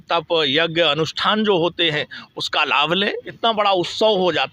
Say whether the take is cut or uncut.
cut